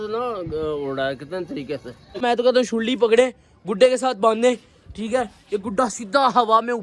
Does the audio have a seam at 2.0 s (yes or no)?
yes